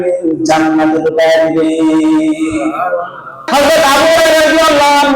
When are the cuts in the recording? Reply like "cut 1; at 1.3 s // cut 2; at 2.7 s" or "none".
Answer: cut 1; at 3.5 s